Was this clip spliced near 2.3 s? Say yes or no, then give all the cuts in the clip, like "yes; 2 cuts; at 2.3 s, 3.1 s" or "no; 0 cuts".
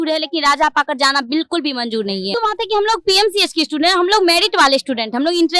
yes; 1 cut; at 2.3 s